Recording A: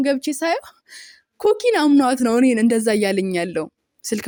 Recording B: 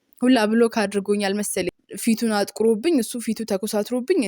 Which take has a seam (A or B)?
B